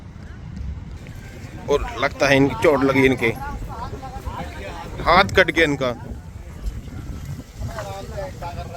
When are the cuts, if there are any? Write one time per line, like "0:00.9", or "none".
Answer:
none